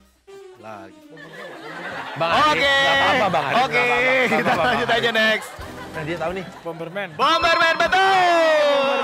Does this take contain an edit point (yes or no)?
no